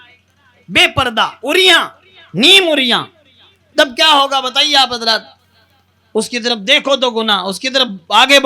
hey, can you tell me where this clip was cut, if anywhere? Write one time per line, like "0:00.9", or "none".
none

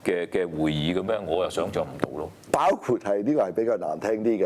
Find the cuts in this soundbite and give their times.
0:02.3

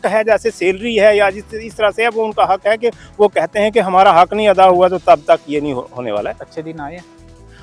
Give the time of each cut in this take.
0:06.4

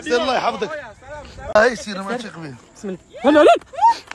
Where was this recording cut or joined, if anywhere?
0:01.5

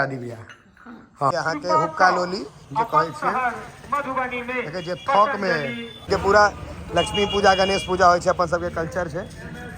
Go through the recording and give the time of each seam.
0:01.3
0:06.1

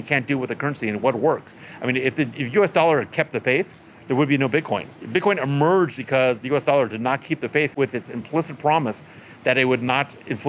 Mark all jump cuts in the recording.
0:05.0
0:06.1
0:07.7

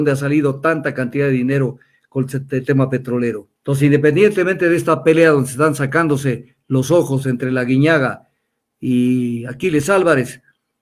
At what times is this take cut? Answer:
0:03.5

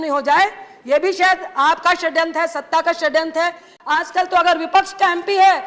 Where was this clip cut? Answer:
0:03.8

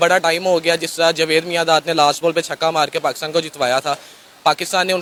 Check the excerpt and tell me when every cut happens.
none

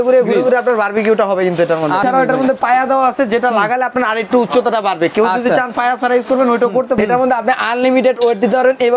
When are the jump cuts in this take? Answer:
0:02.0
0:07.0

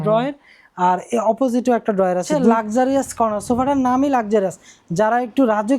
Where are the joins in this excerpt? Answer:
0:02.3

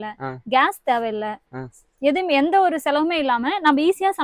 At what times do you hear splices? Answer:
none

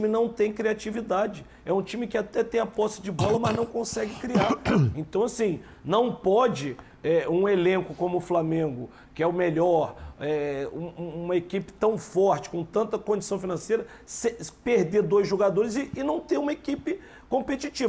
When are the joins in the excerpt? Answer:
none

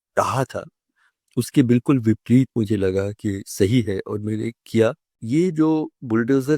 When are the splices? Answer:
0:05.1

